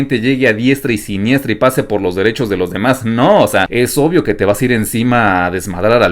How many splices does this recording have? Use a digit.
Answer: 1